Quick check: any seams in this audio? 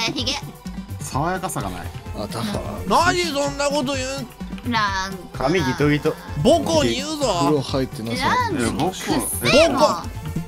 no; 0 cuts

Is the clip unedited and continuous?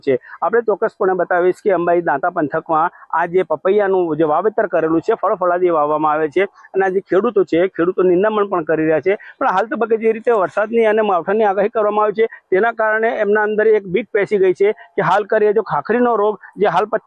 no; 1 cut; at 10.2 s

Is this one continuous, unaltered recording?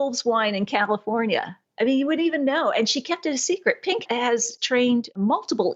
yes; 0 cuts

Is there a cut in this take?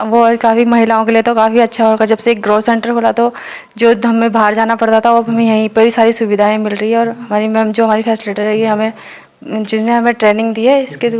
no; 0 cuts

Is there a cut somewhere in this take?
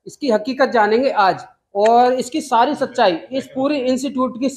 no; 0 cuts

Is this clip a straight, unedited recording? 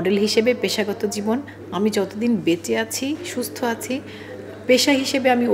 yes; 0 cuts

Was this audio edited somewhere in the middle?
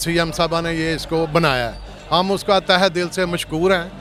no; 0 cuts

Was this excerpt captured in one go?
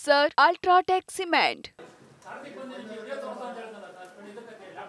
no; 1 cut; at 1.6 s

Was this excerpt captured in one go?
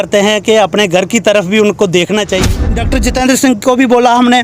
no; 1 cut; at 2.5 s

